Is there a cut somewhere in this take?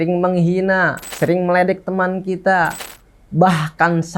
yes; 1 cut; at 1.0 s

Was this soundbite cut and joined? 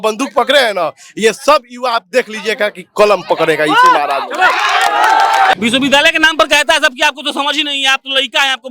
yes; 1 cut; at 5.5 s

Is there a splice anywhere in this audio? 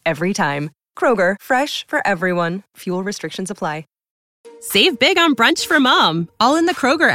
yes; 1 cut; at 4.2 s

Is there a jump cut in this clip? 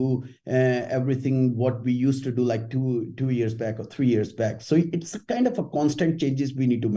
no; 0 cuts

